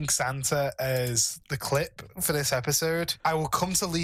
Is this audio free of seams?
no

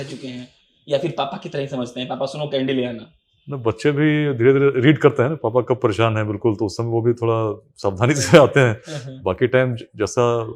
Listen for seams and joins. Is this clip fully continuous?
yes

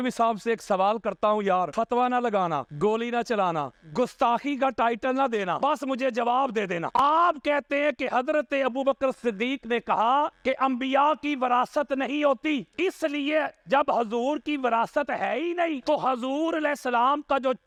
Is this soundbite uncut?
yes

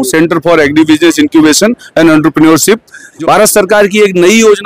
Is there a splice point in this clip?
yes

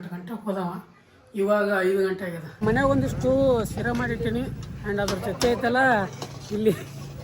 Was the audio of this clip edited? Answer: yes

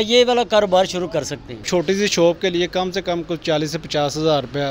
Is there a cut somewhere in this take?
yes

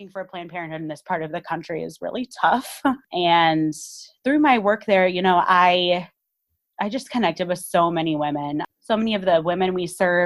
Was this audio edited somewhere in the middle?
yes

